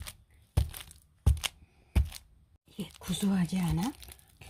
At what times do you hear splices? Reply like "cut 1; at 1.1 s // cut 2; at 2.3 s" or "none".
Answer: cut 1; at 2.6 s